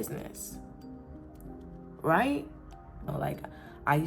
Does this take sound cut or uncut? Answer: cut